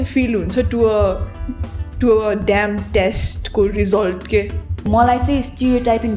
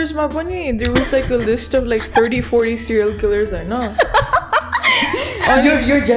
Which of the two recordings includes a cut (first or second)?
first